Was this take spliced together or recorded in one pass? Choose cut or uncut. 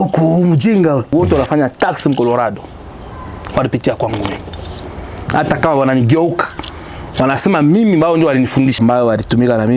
cut